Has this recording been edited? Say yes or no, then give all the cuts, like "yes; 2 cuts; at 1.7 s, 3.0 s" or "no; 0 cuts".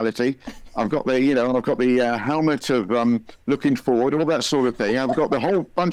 no; 0 cuts